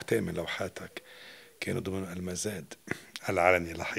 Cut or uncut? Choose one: uncut